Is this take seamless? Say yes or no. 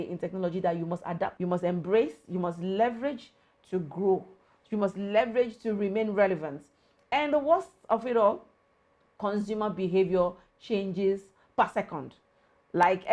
no